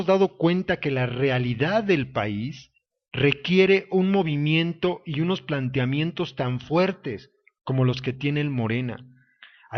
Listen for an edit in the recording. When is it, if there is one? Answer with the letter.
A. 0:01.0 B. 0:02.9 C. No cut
C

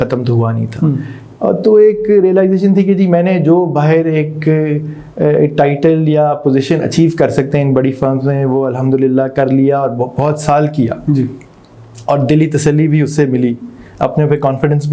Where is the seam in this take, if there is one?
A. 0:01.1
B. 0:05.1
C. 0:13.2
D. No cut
A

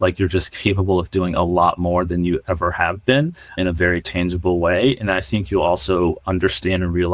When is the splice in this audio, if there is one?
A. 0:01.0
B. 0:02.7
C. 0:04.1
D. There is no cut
C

